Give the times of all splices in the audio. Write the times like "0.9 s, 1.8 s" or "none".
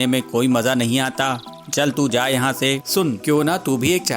2.8 s

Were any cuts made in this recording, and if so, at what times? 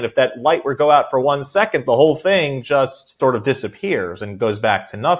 3.2 s

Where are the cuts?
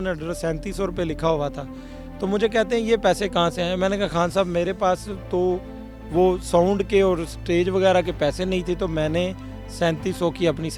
none

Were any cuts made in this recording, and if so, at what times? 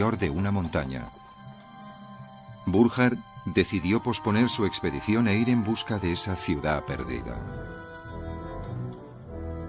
1.4 s

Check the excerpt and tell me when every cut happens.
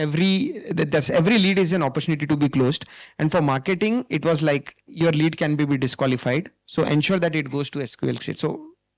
none

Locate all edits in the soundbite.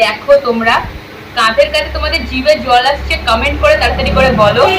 none

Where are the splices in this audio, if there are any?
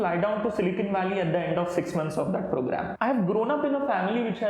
2.9 s

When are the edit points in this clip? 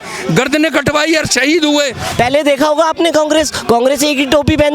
2.0 s

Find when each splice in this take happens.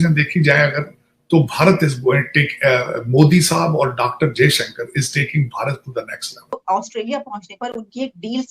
6.6 s

